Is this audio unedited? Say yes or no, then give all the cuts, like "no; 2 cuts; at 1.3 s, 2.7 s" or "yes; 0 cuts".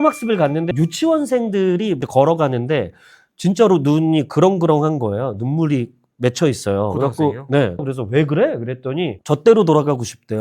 no; 2 cuts; at 7.8 s, 9.2 s